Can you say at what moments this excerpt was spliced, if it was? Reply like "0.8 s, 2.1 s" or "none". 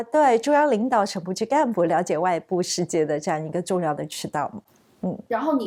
none